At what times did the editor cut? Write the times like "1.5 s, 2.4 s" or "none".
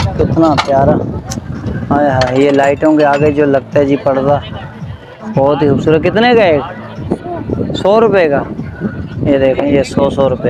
none